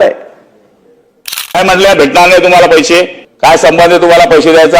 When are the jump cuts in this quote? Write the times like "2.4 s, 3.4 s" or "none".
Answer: 1.6 s, 3.2 s